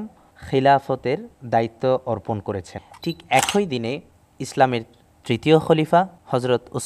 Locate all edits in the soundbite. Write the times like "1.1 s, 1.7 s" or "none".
2.8 s